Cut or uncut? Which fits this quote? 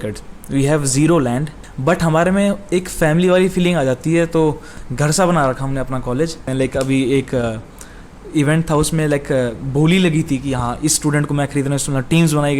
cut